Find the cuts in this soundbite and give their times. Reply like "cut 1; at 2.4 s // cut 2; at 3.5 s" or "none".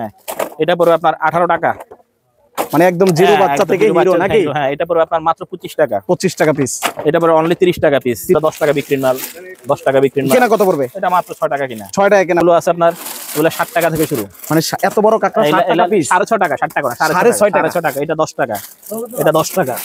cut 1; at 8.3 s // cut 2; at 12.4 s